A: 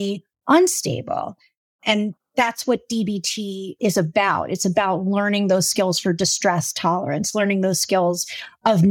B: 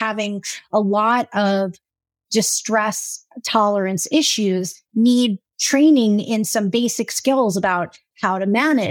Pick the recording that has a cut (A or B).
A